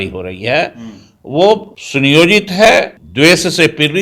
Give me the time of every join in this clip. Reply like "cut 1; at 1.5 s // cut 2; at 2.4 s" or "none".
cut 1; at 1.8 s // cut 2; at 3.0 s